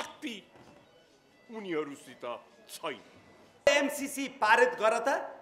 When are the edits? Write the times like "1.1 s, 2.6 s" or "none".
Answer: 3.7 s

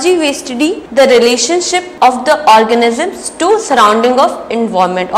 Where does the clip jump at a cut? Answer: 0.8 s, 1.8 s

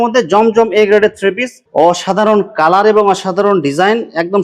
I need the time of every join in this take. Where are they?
1.6 s

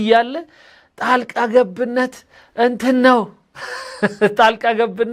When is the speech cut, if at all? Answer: none

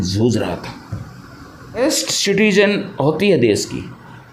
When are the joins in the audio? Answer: 1.8 s

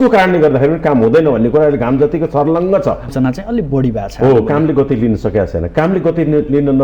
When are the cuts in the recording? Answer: 3.1 s

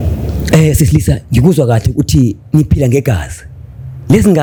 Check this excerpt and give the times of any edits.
none

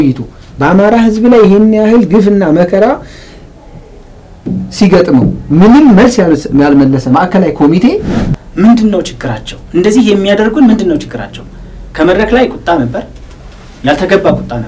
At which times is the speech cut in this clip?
8.2 s

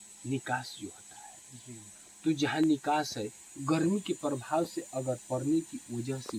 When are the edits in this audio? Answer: none

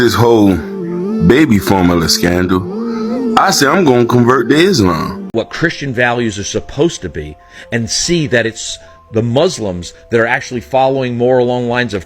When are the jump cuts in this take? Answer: 5.3 s

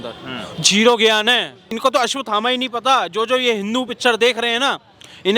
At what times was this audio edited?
1.7 s

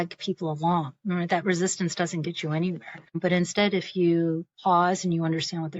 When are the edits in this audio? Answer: 3.2 s

